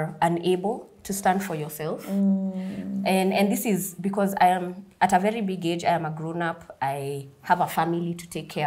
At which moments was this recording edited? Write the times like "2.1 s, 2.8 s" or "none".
none